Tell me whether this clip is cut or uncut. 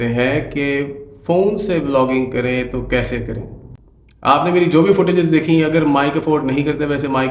uncut